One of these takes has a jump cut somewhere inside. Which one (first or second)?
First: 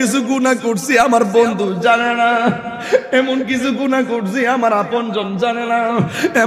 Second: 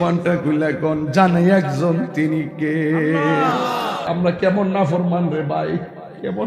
second